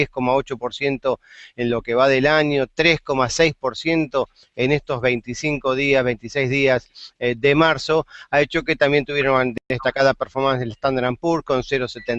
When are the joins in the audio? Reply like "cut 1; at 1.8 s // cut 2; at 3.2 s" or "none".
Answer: cut 1; at 4.5 s